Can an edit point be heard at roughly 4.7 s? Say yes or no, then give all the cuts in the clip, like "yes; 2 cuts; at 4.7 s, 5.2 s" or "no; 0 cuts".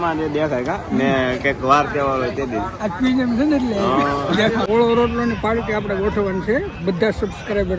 yes; 1 cut; at 4.7 s